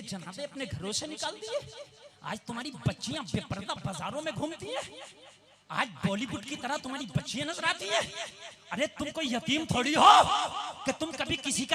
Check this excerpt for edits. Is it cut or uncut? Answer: uncut